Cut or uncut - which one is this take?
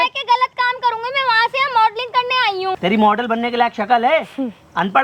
cut